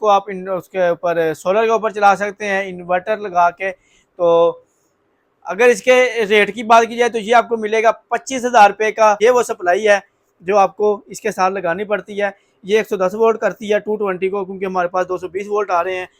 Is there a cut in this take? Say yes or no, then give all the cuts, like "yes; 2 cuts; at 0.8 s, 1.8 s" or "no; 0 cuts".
yes; 1 cut; at 9.2 s